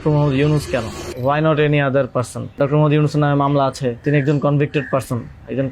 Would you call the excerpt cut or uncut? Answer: cut